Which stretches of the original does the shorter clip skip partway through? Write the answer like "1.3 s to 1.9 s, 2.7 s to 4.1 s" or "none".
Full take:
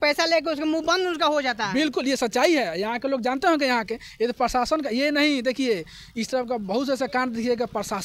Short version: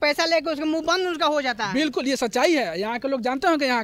none